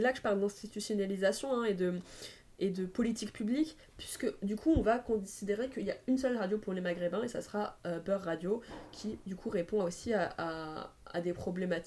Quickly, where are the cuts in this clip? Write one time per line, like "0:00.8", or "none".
none